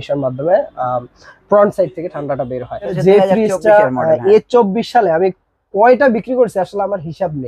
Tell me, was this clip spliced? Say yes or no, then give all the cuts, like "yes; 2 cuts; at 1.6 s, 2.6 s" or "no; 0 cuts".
yes; 1 cut; at 3.0 s